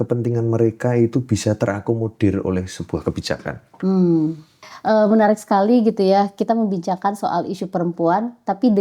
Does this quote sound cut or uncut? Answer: cut